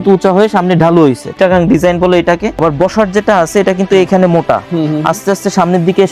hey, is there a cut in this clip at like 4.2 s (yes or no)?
no